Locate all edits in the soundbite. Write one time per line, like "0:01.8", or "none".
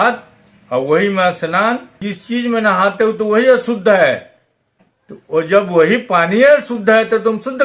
0:02.1